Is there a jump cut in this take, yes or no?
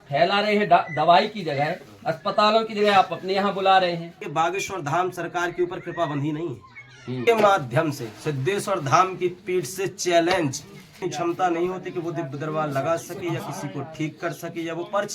yes